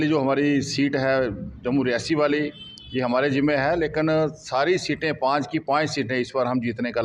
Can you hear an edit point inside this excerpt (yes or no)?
no